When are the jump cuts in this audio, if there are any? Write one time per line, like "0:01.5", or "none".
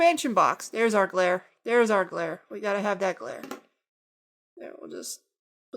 none